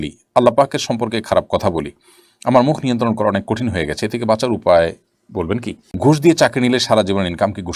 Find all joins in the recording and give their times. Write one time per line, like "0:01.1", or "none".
0:06.0